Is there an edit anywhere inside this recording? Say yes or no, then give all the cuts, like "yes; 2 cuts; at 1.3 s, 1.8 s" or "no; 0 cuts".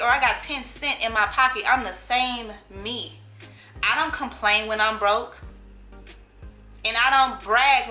no; 0 cuts